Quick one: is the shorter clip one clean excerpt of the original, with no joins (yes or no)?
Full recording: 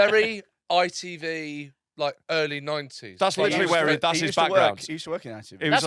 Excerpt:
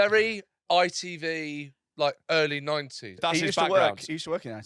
no